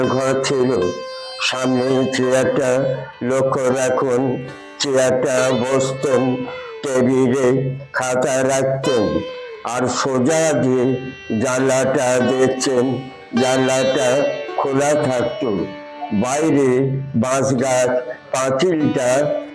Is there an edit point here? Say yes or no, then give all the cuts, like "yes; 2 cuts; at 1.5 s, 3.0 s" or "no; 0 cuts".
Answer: no; 0 cuts